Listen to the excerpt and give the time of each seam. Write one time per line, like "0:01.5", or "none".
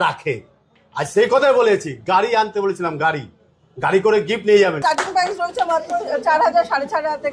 0:04.8